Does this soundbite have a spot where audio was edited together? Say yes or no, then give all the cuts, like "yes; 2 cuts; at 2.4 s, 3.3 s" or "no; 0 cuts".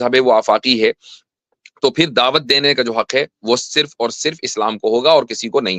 no; 0 cuts